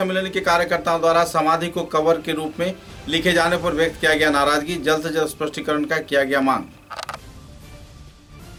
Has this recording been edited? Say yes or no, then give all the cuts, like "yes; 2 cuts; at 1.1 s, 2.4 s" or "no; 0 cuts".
no; 0 cuts